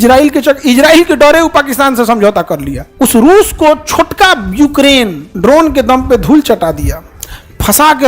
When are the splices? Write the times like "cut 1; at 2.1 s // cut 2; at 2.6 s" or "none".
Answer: cut 1; at 2.8 s // cut 2; at 5.2 s